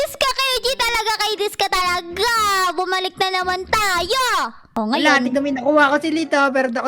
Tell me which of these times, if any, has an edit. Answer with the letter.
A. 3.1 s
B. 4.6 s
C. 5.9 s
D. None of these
B